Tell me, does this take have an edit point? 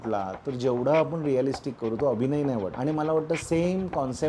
yes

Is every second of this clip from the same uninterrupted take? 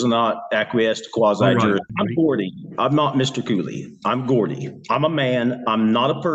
no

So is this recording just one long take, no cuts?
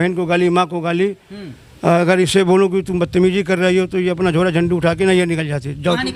yes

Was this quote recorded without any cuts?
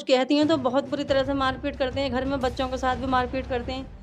yes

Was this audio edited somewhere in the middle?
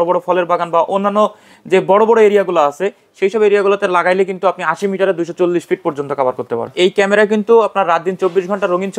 yes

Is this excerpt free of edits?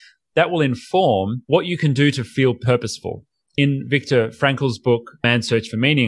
no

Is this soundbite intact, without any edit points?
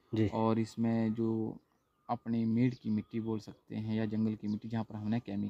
yes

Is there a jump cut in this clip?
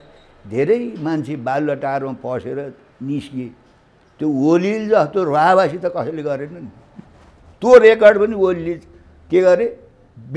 no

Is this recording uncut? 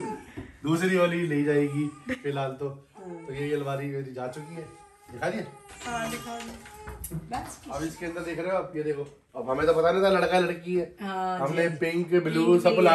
yes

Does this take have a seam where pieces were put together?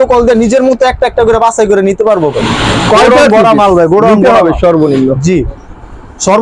no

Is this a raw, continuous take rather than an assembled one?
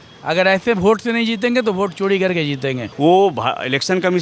no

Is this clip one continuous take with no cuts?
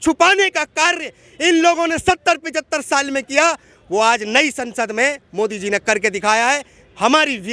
yes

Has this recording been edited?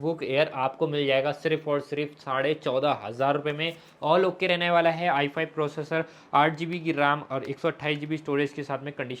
no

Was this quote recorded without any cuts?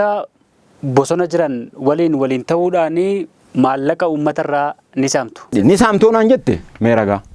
no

